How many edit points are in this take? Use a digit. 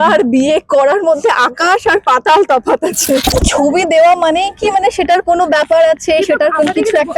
1